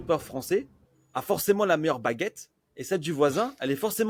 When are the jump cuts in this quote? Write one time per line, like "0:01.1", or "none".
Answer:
none